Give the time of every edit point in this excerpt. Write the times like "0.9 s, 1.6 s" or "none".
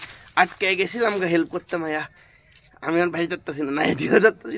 none